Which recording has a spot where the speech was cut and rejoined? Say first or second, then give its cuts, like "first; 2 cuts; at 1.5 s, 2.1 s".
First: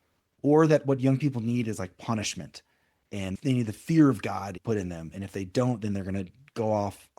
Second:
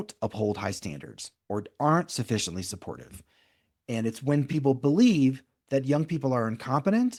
first; 2 cuts; at 3.3 s, 4.6 s